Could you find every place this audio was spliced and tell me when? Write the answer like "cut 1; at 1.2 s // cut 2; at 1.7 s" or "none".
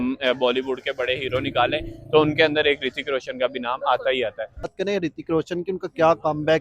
cut 1; at 4.7 s